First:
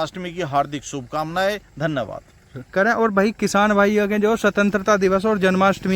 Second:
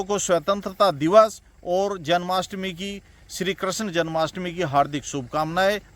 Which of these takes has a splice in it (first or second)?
first